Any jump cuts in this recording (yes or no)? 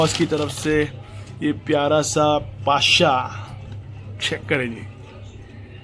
no